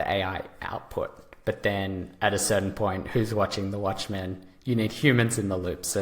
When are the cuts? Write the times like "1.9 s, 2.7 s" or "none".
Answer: none